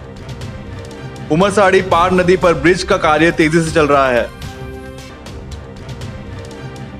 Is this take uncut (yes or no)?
no